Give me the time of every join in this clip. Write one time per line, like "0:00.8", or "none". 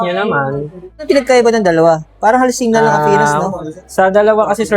0:01.0